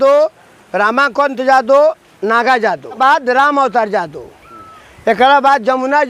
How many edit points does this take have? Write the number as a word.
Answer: one